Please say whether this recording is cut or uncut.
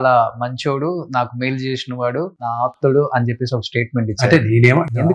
cut